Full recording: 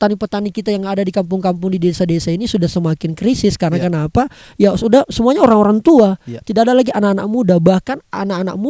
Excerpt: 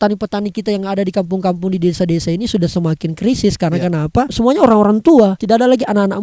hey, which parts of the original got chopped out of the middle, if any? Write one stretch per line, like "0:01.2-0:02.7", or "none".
0:04.3-0:05.1
0:06.2-0:06.5